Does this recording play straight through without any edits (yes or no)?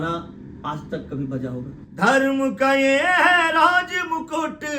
no